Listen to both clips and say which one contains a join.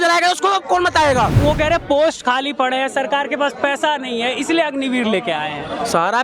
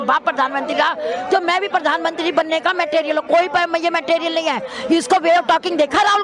first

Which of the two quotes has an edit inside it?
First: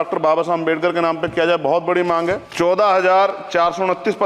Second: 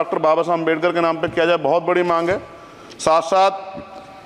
first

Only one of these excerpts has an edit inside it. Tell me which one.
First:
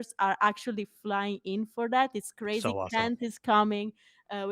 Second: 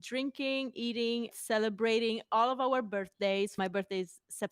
second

